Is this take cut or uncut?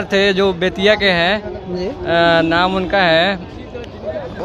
uncut